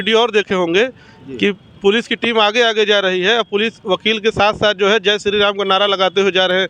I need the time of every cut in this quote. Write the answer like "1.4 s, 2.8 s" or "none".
none